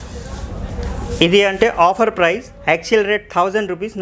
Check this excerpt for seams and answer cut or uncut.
uncut